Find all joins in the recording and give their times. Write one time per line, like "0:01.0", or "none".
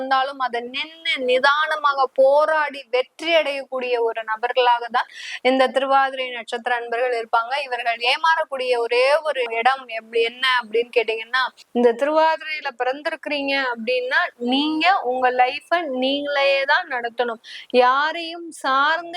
0:09.5
0:11.5